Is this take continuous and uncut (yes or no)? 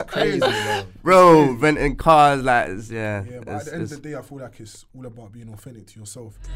yes